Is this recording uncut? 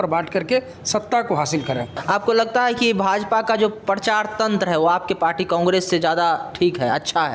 no; 1 cut; at 2.0 s

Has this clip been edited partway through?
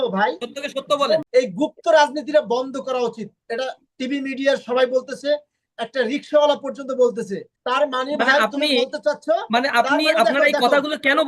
yes; 2 cuts; at 1.3 s, 7.5 s

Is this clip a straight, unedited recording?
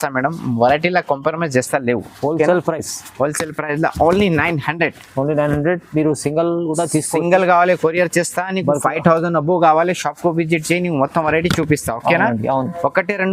yes; 0 cuts

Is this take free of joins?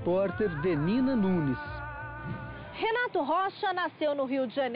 no; 1 cut; at 3.1 s

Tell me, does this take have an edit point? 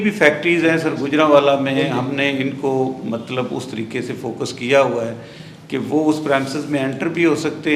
no; 0 cuts

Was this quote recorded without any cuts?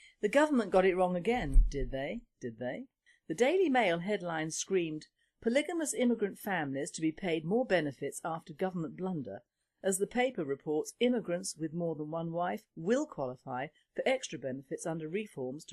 no; 1 cut; at 8.6 s

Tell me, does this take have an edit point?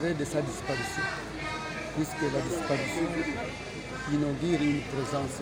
no; 0 cuts

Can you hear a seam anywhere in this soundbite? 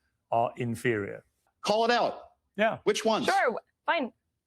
yes; 1 cut; at 1.5 s

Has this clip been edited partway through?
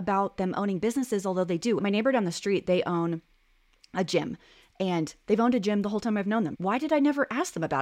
yes; 2 cuts; at 1.8 s, 6.5 s

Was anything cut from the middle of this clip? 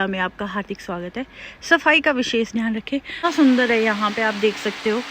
yes; 1 cut; at 3.2 s

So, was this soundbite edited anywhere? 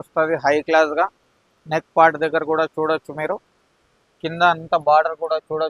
no; 0 cuts

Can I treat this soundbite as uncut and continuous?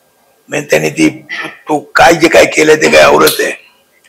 yes; 0 cuts

